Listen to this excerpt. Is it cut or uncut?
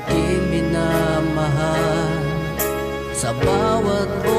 uncut